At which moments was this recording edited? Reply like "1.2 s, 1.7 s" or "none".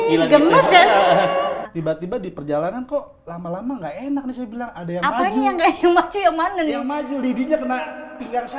1.7 s